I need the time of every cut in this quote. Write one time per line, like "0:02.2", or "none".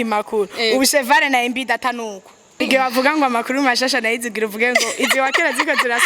0:02.6